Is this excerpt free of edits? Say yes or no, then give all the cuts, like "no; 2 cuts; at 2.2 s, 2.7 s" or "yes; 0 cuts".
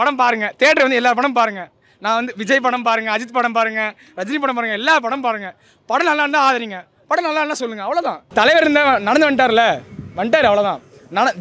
yes; 0 cuts